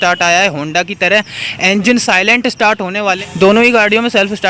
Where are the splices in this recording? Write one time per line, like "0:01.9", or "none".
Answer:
0:03.3